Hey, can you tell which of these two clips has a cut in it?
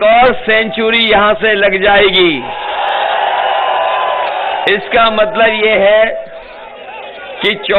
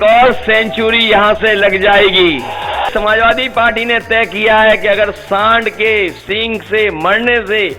second; 1 cut; at 2.9 s

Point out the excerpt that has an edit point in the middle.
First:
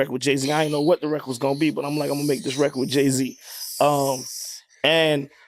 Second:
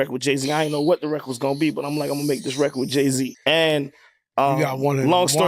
second; 1 cut; at 3.4 s

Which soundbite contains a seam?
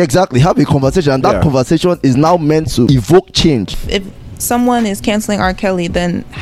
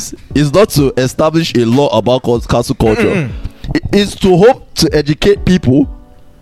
first; 2 cuts; at 2.9 s, 3.8 s

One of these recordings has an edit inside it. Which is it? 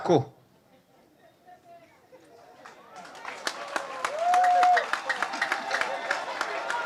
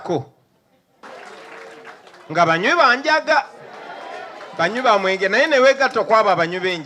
second; 1 cut; at 1.0 s

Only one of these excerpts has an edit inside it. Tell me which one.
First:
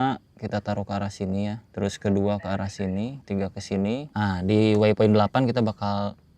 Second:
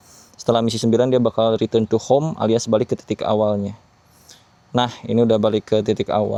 first; 3 cuts; at 1.6 s, 3.2 s, 4.1 s

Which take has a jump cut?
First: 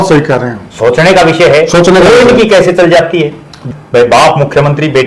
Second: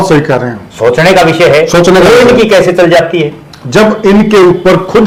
first; 1 cut; at 3.6 s

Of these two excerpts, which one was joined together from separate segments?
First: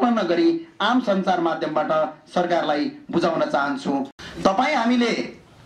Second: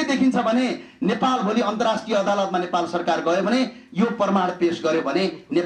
first; 1 cut; at 4.1 s

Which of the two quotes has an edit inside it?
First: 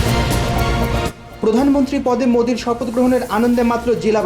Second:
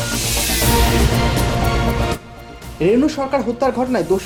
first; 1 cut; at 1.3 s

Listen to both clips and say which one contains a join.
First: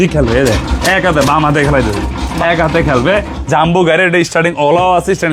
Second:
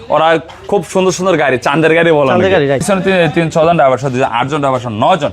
second; 1 cut; at 2.8 s

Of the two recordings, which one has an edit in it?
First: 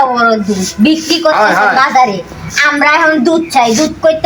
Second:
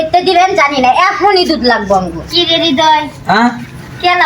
second; 1 cut; at 2.2 s

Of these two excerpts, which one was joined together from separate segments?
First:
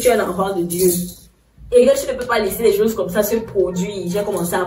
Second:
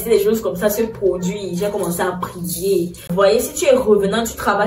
second; 1 cut; at 3.1 s

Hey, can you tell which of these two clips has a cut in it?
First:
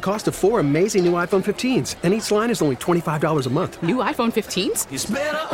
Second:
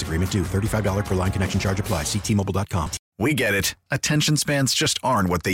second; 1 cut; at 3.0 s

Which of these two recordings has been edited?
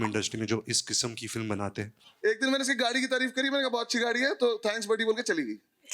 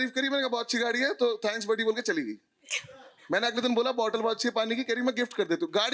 first; 1 cut; at 2.0 s

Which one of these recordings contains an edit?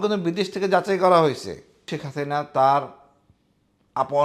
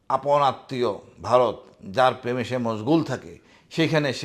first; 1 cut; at 2.0 s

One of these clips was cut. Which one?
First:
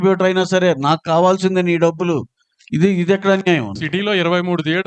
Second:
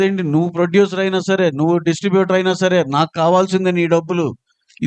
first; 1 cut; at 3.8 s

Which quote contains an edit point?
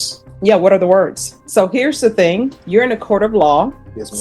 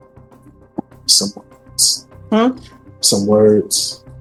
first; 2 cuts; at 1.3 s, 2.6 s

